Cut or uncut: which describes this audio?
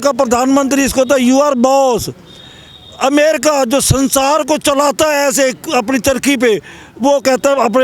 uncut